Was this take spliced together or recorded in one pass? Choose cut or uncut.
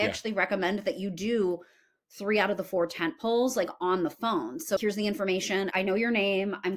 cut